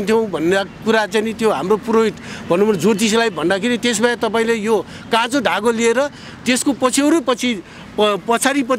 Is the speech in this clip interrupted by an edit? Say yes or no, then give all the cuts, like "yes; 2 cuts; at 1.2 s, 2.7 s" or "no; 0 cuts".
no; 0 cuts